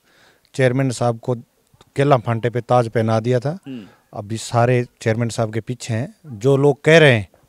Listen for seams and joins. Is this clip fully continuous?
yes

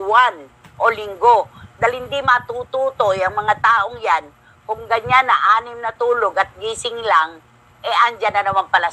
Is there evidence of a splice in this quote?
no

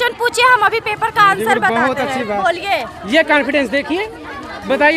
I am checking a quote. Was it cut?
no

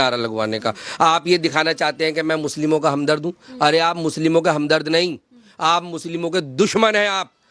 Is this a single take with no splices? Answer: yes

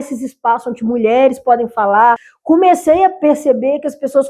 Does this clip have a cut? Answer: yes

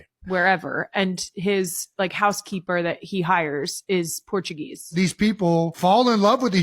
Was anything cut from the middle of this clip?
yes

